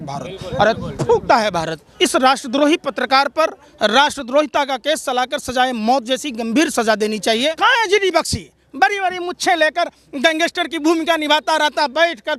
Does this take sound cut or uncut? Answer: cut